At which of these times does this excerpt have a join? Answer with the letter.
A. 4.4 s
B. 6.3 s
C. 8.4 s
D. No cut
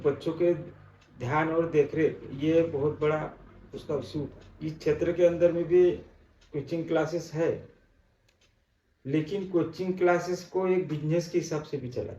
A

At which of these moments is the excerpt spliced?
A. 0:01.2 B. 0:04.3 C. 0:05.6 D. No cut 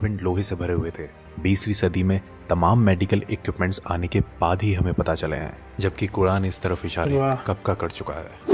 A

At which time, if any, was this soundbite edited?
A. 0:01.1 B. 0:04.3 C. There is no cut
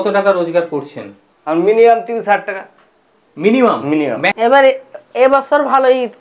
B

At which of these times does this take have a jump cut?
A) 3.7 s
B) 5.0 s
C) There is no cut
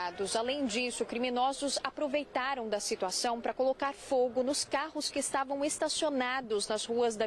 C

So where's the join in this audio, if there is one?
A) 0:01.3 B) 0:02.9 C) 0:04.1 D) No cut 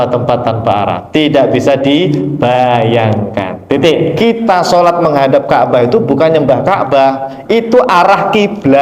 C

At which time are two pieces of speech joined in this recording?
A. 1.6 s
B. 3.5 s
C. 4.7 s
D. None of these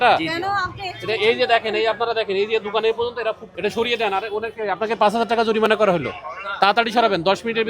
B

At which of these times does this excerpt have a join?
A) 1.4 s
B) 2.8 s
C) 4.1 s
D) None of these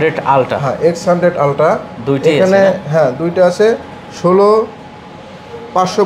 D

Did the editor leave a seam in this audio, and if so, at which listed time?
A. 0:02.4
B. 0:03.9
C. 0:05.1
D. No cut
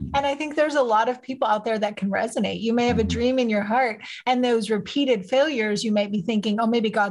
D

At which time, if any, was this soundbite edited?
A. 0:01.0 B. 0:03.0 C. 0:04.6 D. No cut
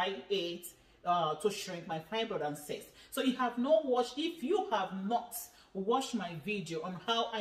D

